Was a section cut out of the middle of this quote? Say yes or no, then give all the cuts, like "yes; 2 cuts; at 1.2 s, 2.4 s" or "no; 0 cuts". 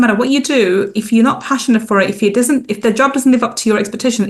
no; 0 cuts